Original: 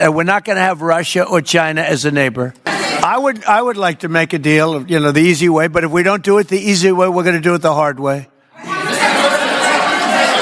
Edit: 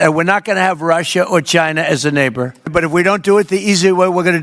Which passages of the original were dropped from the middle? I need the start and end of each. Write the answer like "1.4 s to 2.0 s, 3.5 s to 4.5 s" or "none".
2.7 s to 5.7 s